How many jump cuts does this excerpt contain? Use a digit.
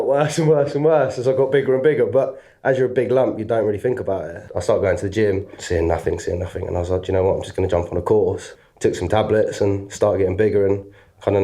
1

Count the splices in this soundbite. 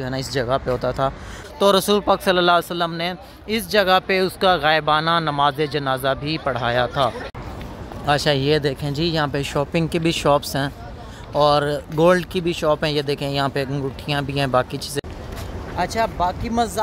3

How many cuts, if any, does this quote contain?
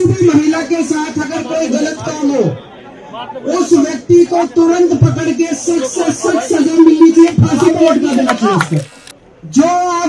1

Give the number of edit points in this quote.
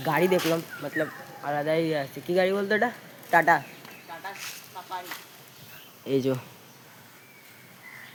0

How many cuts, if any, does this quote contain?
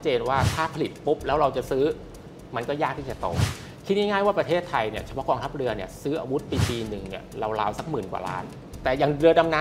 2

